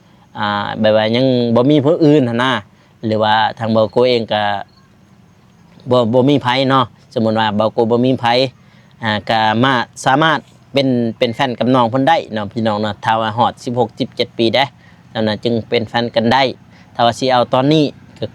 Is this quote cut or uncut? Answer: uncut